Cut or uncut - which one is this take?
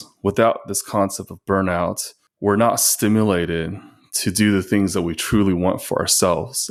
uncut